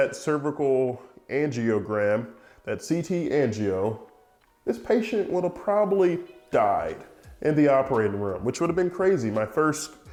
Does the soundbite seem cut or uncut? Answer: uncut